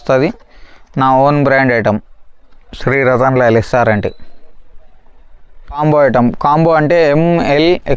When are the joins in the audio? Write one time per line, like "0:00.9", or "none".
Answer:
0:05.8